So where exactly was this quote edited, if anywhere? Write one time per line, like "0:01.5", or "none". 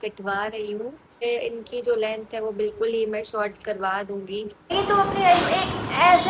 0:01.2
0:04.7